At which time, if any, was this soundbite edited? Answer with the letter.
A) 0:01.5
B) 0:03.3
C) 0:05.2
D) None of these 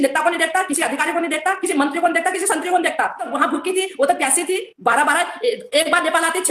B